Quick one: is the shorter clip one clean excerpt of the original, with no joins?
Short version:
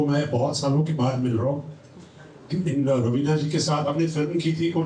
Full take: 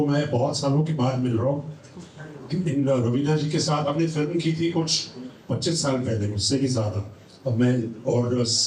yes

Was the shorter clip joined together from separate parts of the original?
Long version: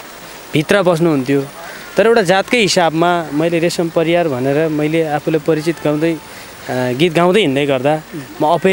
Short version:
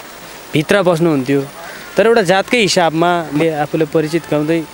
yes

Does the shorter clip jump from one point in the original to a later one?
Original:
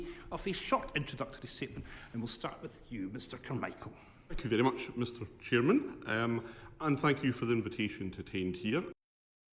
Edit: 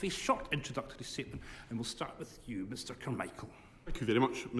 no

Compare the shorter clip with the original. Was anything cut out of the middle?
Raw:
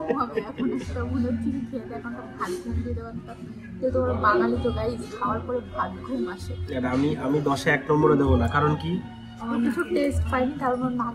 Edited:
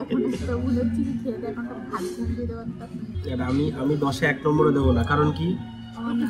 yes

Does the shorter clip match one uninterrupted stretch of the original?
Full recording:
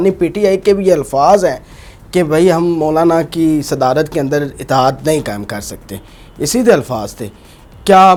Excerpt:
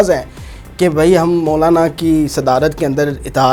yes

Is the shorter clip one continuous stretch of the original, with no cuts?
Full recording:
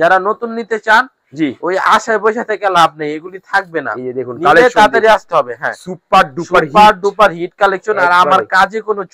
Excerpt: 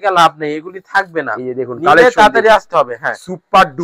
yes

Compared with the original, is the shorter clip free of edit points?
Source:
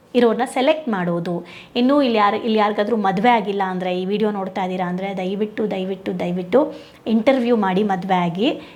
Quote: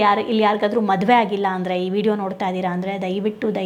yes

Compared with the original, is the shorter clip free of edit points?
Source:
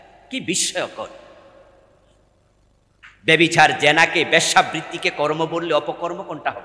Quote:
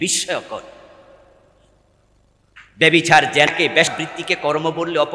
no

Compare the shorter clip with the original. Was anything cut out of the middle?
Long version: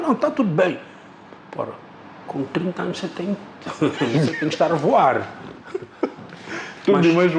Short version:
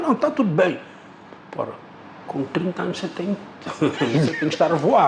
no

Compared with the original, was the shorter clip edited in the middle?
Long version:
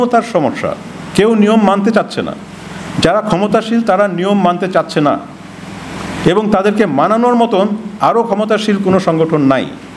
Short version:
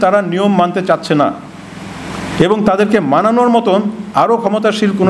no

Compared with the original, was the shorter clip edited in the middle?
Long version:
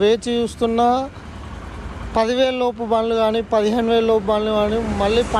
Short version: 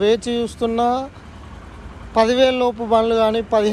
no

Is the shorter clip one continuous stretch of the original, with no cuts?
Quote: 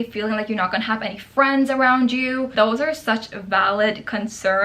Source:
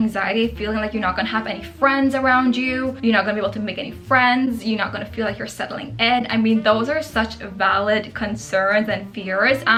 no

